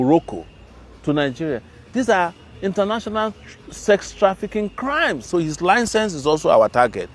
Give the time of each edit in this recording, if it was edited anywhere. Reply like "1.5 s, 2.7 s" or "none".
5.3 s

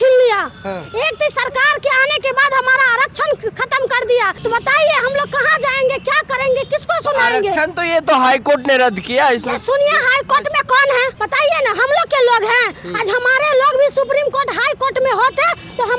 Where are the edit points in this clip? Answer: 4.3 s, 11.2 s

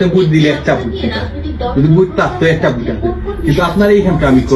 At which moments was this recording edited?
none

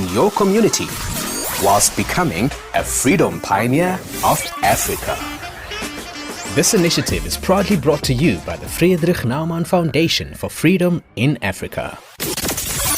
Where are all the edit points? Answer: 12.1 s

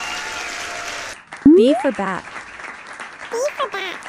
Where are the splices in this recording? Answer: 1.1 s

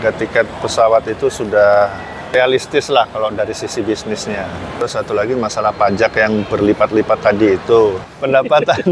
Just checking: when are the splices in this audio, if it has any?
2.4 s, 4.8 s, 8.0 s

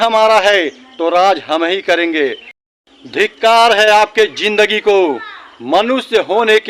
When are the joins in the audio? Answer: 2.9 s

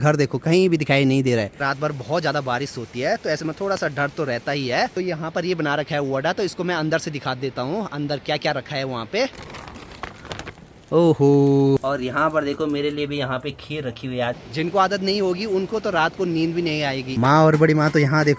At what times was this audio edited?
1.6 s, 4.9 s, 9.5 s, 11.8 s, 14.4 s, 17.1 s

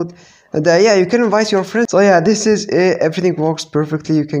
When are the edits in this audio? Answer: 1.9 s

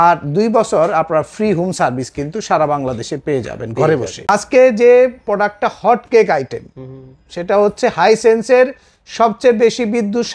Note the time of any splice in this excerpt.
4.2 s

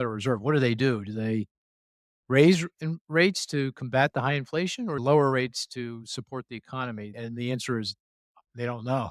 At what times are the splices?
5.0 s, 7.1 s

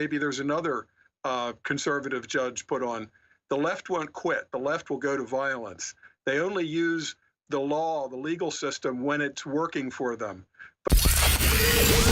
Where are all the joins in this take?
10.9 s

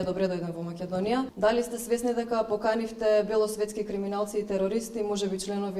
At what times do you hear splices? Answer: 1.3 s

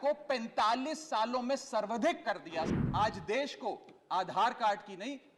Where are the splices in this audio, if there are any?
2.7 s

